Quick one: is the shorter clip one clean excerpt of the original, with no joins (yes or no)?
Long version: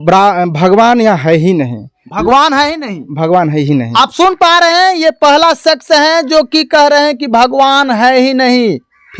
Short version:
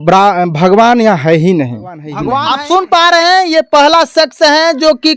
no